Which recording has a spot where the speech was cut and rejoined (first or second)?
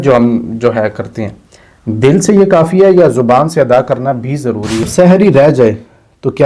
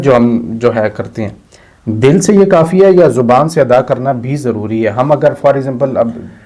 first